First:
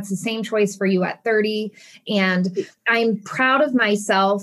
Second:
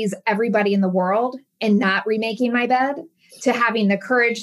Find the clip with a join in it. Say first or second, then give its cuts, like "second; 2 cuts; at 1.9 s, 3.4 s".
first; 1 cut; at 1.9 s